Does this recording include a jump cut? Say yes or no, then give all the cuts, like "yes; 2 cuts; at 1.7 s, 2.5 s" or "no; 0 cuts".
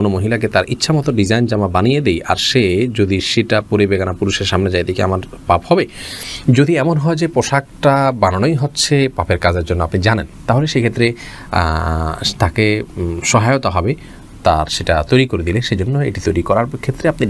no; 0 cuts